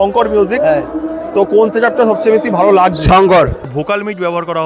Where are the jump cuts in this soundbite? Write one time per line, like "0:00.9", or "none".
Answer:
0:03.7

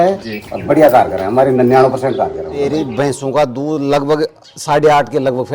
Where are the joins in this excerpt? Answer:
0:02.6

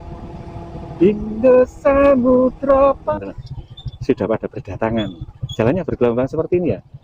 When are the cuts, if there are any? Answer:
0:03.1

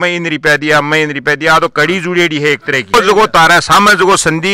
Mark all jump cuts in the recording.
none

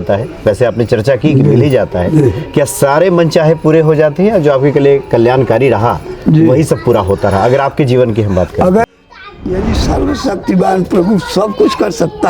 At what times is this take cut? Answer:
0:08.8

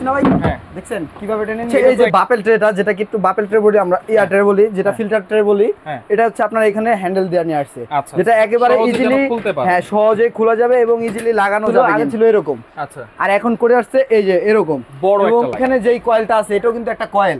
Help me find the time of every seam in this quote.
0:01.9
0:11.9
0:15.6

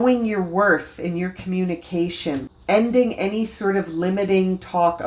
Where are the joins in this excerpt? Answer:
0:02.5

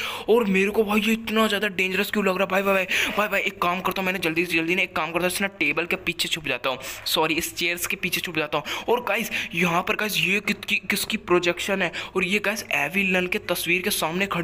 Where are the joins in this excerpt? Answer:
none

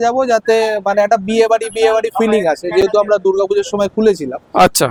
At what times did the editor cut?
none

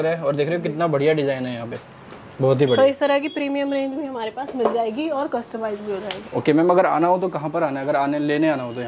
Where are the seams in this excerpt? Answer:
none

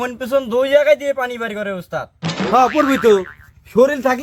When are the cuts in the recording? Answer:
none

